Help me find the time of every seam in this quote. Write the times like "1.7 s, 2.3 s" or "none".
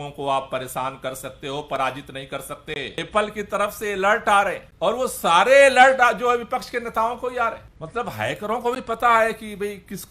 3.0 s, 4.6 s, 7.7 s